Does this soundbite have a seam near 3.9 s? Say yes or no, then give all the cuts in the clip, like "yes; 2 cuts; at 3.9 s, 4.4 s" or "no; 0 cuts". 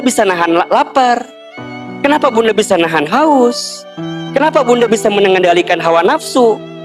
no; 0 cuts